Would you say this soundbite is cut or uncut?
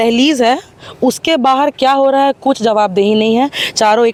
uncut